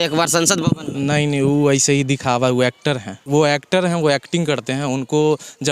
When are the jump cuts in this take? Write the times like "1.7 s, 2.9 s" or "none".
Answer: 3.2 s